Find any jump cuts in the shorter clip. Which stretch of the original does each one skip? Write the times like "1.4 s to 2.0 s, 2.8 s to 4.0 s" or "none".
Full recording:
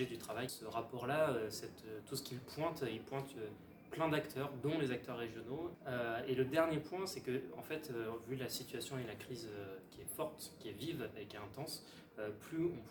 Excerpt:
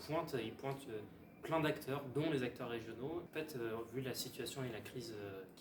5.8 s to 7.6 s